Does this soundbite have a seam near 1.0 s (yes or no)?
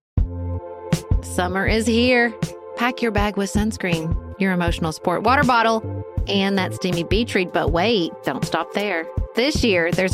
yes